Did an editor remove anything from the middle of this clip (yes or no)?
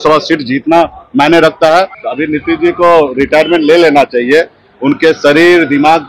yes